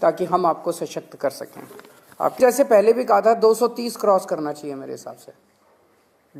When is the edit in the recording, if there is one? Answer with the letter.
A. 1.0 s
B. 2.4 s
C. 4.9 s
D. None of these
B